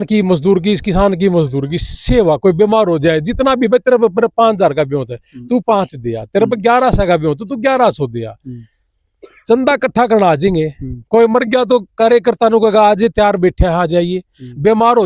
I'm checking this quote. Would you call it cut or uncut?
uncut